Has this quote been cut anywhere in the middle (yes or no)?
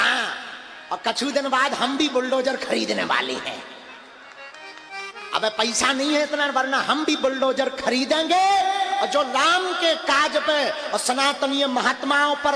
no